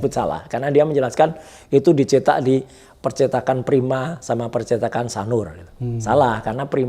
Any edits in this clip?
no; 0 cuts

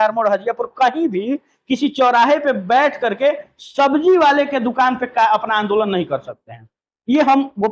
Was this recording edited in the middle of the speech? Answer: no; 0 cuts

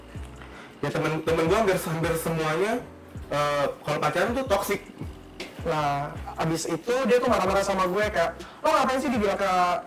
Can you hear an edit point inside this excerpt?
yes; 1 cut; at 5.2 s

